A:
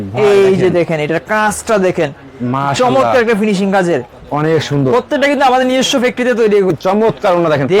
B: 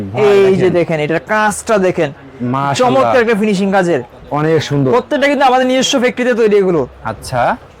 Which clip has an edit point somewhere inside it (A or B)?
A